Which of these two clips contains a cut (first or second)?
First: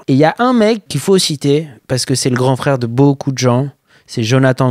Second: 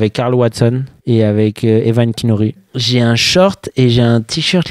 second